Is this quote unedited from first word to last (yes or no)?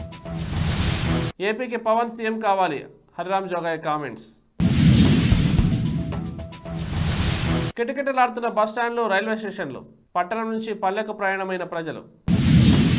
yes